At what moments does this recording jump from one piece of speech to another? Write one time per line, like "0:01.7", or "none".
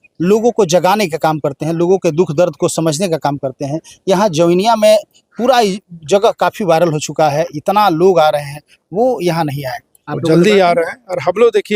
none